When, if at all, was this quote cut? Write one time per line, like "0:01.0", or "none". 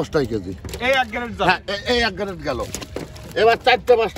none